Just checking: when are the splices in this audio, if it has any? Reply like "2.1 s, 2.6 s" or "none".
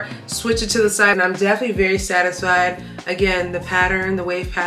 1.1 s